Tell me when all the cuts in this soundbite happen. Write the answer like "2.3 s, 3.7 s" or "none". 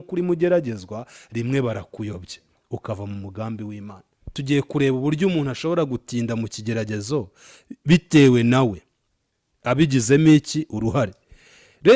4.4 s

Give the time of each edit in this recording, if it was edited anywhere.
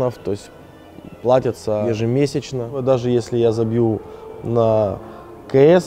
1.8 s, 2.8 s

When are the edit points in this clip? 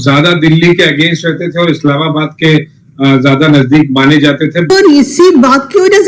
4.7 s

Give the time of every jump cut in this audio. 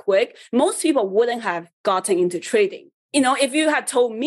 3.0 s

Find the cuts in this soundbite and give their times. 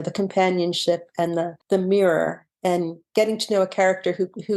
1.6 s, 3.0 s

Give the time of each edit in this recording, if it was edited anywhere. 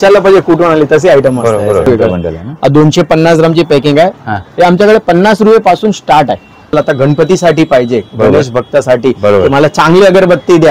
1.9 s, 6.7 s

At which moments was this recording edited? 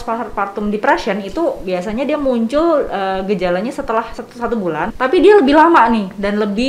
4.5 s

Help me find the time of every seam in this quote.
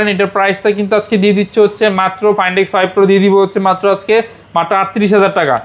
none

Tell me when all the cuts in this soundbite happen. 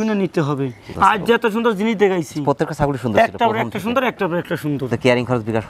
0.9 s, 4.9 s

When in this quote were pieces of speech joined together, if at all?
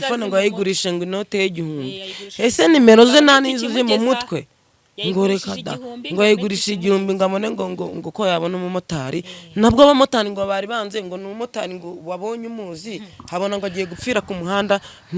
none

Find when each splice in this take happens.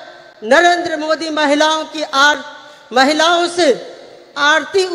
none

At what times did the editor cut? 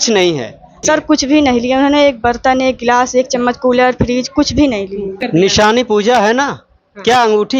0.8 s, 5.2 s

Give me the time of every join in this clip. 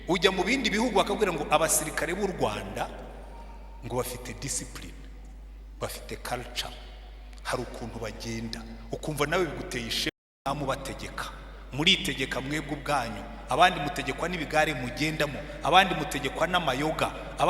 10.4 s

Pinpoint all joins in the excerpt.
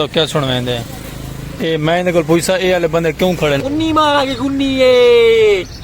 3.6 s

